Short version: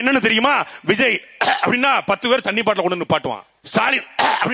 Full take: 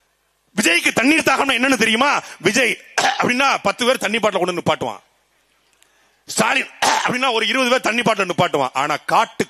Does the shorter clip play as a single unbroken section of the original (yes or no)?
no